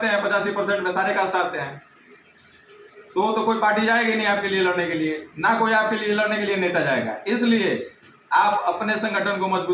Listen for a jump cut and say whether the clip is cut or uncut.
uncut